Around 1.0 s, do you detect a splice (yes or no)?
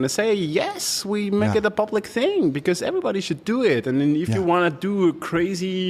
no